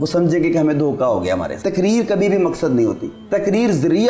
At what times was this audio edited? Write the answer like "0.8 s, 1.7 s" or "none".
1.5 s, 3.1 s